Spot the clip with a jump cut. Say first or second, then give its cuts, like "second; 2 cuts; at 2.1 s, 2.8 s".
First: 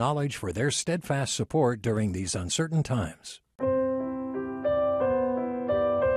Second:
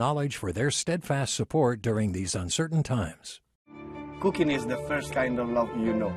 first; 1 cut; at 3.4 s